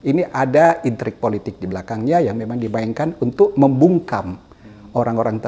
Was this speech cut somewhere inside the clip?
no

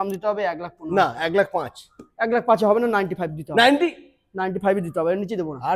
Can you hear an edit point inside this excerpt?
no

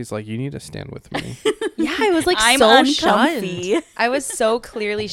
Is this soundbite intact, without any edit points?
yes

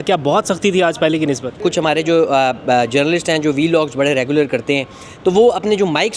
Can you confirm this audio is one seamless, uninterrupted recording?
no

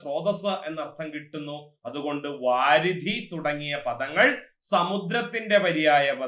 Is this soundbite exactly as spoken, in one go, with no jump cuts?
yes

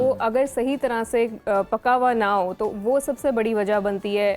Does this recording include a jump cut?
no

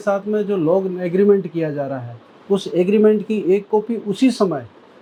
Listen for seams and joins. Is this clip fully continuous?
yes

